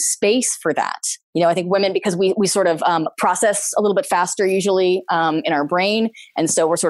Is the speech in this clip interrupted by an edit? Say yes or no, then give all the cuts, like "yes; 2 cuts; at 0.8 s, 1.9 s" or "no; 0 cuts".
yes; 1 cut; at 1.3 s